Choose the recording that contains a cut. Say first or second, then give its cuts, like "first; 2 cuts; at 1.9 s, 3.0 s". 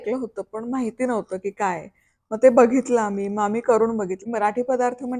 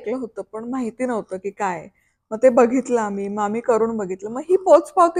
first; 1 cut; at 4.2 s